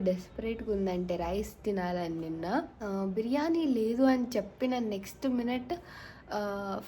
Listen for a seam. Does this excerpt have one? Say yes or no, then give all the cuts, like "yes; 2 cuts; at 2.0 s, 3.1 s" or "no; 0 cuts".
yes; 1 cut; at 2.7 s